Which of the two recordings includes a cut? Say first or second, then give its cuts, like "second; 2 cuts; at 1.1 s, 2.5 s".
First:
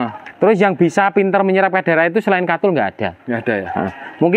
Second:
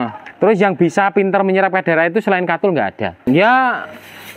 second; 1 cut; at 3.2 s